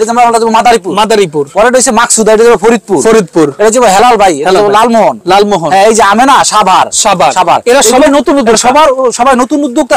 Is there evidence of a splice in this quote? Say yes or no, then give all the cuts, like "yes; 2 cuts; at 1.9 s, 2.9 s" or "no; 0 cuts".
no; 0 cuts